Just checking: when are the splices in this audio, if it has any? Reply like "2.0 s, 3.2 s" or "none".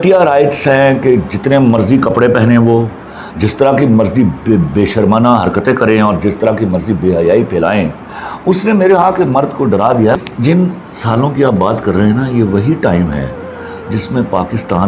10.2 s